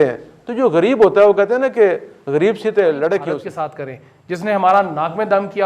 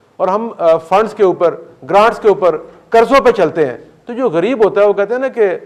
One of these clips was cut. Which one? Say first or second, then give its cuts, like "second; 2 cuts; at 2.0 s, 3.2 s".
first; 1 cut; at 3.4 s